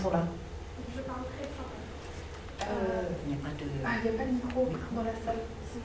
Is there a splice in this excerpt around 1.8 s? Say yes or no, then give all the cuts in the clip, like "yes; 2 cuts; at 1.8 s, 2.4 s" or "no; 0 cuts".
no; 0 cuts